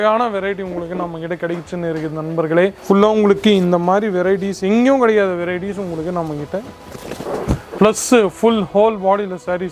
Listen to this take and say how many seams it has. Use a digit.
2